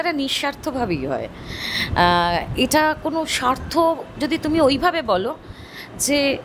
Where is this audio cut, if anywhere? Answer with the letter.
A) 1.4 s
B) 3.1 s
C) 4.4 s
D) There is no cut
D